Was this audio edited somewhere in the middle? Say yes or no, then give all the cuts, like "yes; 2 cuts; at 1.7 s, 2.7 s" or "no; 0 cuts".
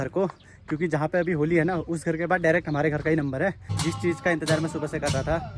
yes; 1 cut; at 3.7 s